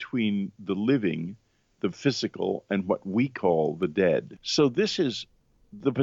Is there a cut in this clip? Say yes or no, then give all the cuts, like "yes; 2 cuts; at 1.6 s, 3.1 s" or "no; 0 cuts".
yes; 1 cut; at 4.4 s